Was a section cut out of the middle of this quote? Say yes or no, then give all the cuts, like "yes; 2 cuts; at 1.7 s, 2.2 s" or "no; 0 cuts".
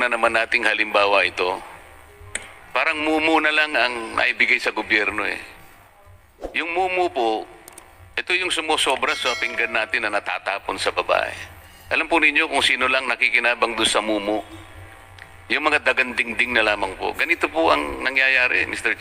no; 0 cuts